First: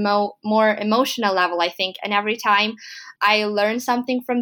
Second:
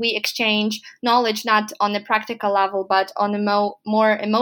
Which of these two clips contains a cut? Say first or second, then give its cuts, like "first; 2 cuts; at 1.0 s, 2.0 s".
first; 1 cut; at 3.0 s